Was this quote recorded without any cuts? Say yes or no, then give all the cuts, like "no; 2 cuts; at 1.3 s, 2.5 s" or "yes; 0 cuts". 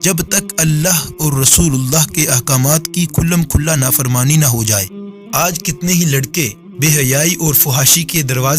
no; 2 cuts; at 5.4 s, 6.6 s